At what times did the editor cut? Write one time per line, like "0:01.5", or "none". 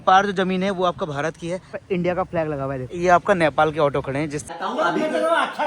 0:01.8
0:02.9
0:04.5